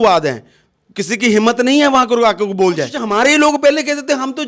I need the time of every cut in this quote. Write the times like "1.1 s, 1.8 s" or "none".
3.0 s